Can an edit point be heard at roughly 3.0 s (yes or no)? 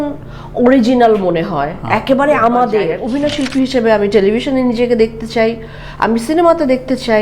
yes